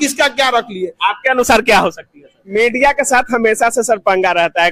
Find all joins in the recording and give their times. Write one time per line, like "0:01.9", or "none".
0:02.4

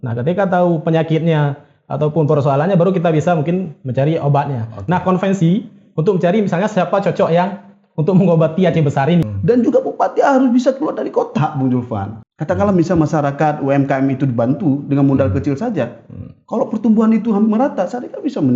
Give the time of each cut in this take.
0:09.2
0:12.1

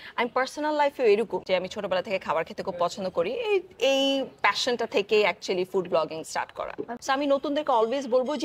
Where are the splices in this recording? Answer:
0:01.4
0:06.9

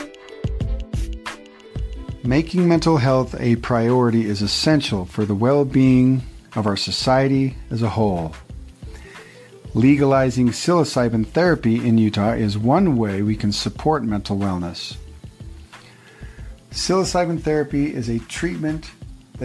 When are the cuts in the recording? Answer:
0:02.2

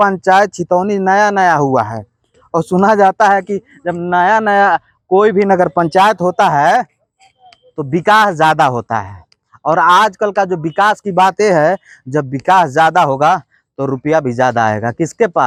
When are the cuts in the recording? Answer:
none

